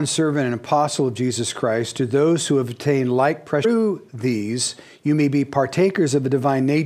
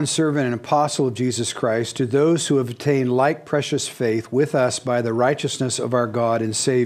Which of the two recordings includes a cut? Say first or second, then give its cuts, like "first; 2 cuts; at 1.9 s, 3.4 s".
second; 1 cut; at 3.6 s